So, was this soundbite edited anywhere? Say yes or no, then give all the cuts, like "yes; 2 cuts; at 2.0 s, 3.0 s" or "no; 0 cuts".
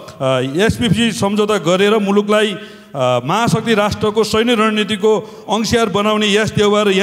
no; 0 cuts